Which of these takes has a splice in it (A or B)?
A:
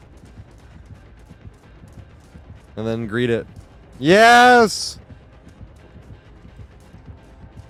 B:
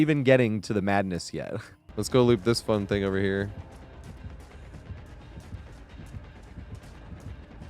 B